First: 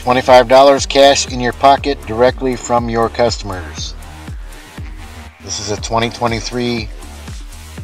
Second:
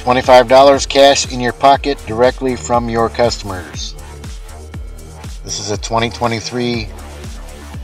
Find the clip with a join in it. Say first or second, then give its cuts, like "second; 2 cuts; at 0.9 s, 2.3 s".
second; 2 cuts; at 3.7 s, 5.0 s